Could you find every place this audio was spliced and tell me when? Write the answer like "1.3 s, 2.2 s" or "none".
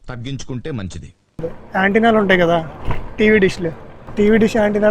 1.6 s